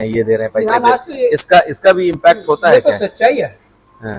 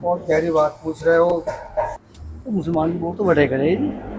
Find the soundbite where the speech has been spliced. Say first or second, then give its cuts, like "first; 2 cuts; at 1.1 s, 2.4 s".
second; 1 cut; at 2.0 s